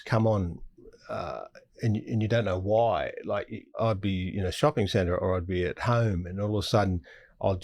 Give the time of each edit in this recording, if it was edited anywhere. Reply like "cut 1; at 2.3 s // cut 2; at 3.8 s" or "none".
cut 1; at 3.8 s